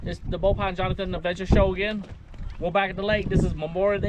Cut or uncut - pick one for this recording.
uncut